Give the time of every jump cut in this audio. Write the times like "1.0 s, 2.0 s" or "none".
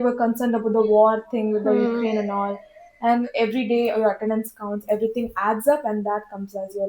3.3 s